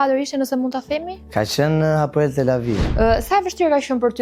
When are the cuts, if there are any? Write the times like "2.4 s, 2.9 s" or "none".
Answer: 1.2 s, 2.9 s